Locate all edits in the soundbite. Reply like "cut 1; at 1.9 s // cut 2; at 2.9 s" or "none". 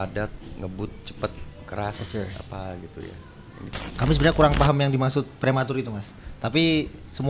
cut 1; at 3.8 s

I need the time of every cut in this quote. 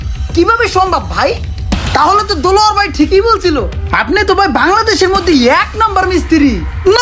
none

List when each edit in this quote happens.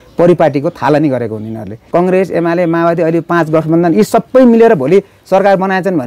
cut 1; at 1.8 s

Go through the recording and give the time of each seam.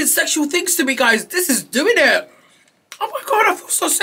none

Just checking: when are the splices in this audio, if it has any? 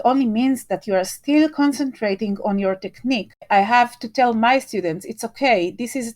cut 1; at 3.4 s

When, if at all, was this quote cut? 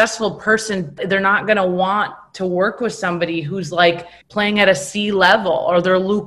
cut 1; at 1.0 s // cut 2; at 4.2 s

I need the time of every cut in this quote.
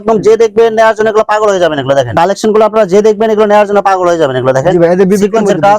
cut 1; at 2.1 s

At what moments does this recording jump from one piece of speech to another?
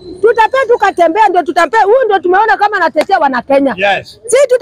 none

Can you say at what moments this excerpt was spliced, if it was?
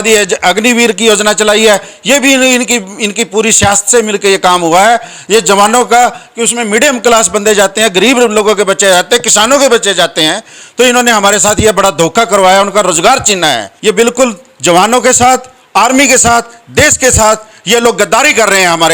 cut 1; at 13.7 s

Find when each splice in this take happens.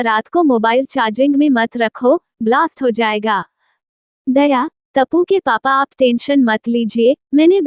none

